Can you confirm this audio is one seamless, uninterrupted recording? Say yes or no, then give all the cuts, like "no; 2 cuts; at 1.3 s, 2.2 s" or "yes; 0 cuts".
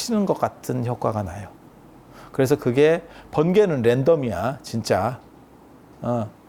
yes; 0 cuts